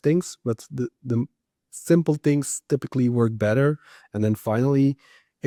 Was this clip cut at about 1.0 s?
no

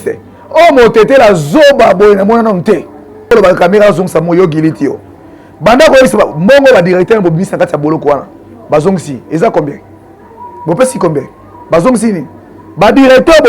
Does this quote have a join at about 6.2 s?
no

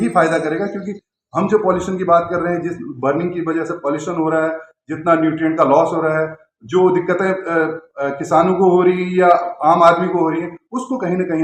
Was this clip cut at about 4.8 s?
no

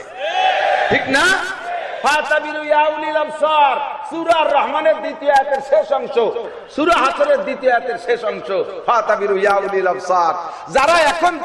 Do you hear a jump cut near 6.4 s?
yes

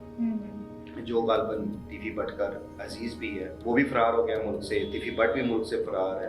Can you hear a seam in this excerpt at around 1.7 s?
no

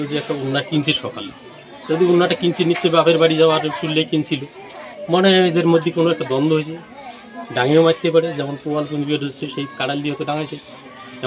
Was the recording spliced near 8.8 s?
no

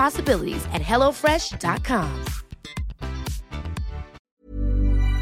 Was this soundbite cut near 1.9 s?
no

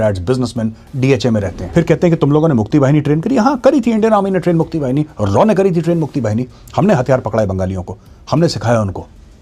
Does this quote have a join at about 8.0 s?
no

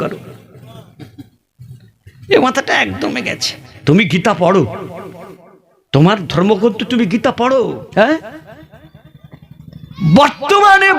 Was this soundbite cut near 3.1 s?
no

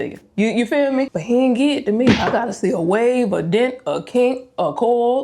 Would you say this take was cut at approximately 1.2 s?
yes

